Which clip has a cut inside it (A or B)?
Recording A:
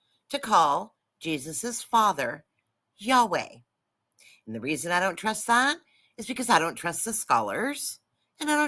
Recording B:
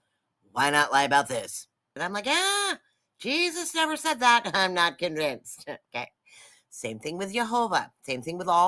B